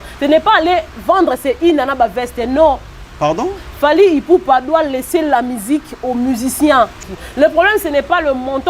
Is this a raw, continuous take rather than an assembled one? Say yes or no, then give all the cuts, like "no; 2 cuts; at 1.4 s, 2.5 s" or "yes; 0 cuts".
no; 1 cut; at 7.0 s